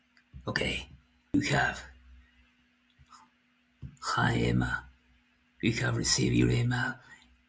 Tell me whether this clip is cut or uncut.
cut